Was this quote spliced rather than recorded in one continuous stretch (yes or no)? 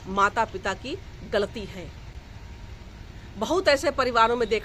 no